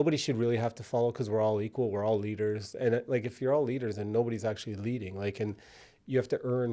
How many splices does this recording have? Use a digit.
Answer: 0